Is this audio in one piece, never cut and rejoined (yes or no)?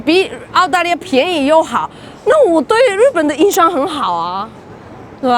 yes